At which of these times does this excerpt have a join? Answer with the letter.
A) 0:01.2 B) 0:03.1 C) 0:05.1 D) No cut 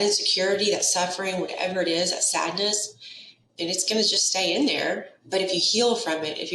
C